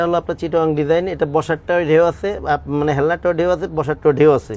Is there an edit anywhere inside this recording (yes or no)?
no